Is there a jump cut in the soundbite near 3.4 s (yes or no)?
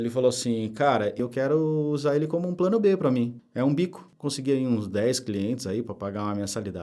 no